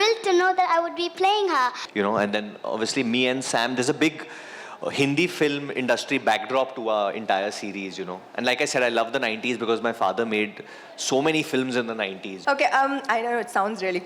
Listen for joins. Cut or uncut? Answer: cut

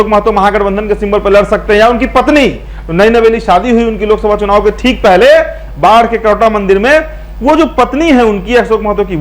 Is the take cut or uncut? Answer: uncut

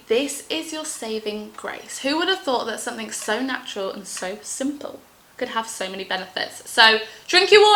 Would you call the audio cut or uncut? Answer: uncut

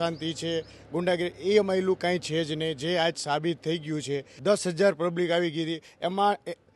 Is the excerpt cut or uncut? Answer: cut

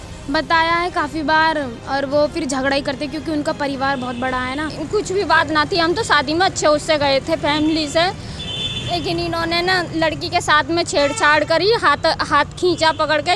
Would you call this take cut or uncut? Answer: cut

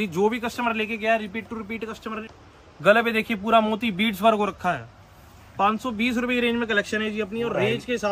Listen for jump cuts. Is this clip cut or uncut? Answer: cut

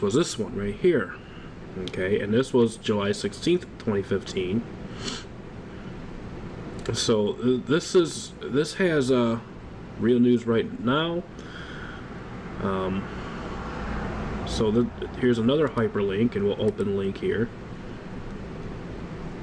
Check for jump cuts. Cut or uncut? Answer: uncut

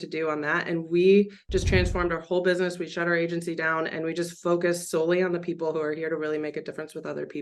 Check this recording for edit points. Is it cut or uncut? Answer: uncut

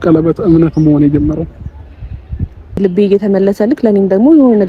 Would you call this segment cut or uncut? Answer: cut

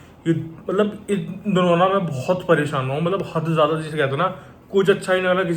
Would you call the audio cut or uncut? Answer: uncut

